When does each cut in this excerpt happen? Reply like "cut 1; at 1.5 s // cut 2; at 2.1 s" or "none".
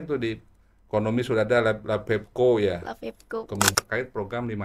cut 1; at 3.7 s